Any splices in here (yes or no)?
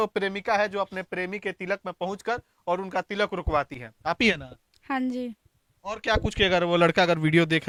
no